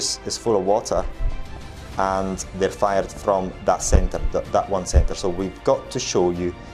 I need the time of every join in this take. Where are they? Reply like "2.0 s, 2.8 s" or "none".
none